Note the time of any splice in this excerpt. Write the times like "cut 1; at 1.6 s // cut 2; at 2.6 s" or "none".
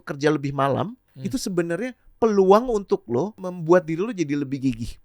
cut 1; at 1.1 s // cut 2; at 3.5 s